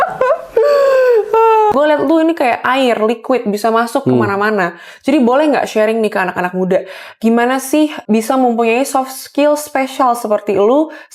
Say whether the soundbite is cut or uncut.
cut